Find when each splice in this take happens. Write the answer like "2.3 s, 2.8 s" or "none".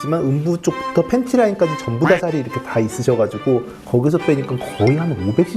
none

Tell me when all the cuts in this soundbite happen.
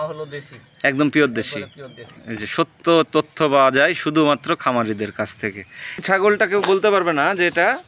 6.0 s

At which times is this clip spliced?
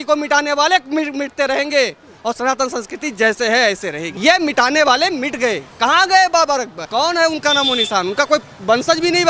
4.1 s, 5.7 s, 6.9 s

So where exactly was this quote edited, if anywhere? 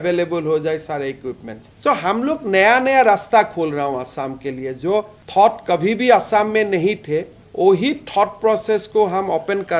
none

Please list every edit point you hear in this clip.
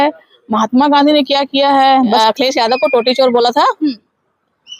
2.2 s

